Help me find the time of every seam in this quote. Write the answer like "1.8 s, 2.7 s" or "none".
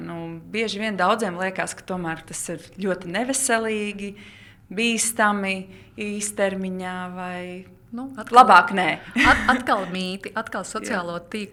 none